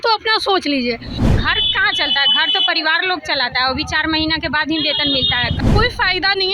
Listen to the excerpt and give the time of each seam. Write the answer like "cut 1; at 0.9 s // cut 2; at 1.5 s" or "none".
cut 1; at 1.1 s // cut 2; at 5.6 s